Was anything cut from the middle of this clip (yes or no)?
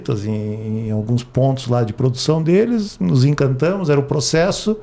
no